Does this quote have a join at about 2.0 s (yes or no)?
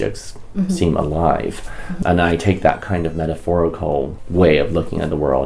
yes